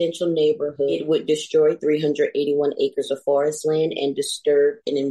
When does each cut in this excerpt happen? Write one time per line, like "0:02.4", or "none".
0:01.0

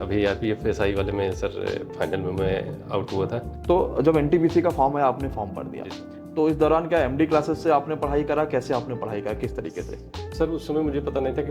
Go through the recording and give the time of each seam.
0:03.5

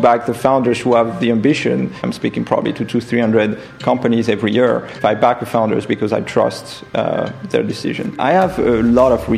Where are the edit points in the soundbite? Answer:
0:02.0
0:04.9
0:08.2

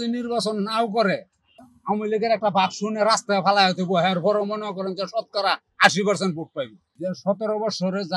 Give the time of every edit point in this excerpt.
0:01.7
0:06.8

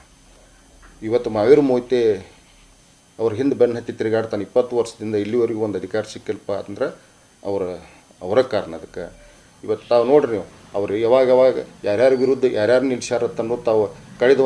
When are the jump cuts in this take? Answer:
0:09.3

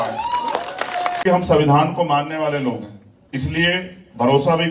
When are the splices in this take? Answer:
0:01.2

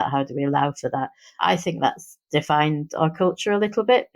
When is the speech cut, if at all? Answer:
0:01.4

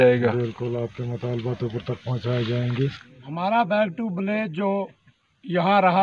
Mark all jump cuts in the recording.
0:03.0

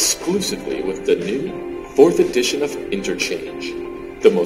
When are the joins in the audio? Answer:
none

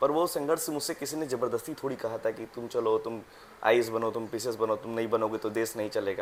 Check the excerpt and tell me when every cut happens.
none

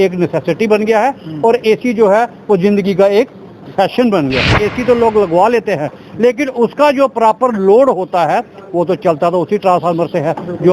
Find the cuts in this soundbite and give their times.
0:04.6

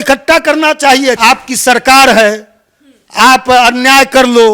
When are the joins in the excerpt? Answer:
0:01.2

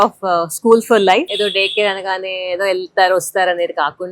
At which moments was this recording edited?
0:01.3

